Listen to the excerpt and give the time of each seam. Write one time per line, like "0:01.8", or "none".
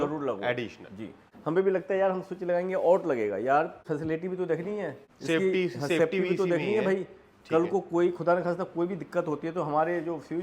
0:01.3
0:03.8
0:05.1